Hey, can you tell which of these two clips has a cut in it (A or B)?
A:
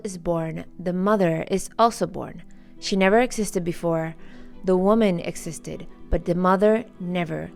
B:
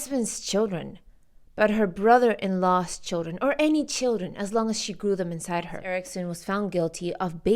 B